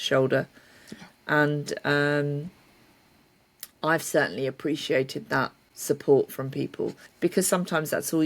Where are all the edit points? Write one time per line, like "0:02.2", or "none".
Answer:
0:05.7
0:07.0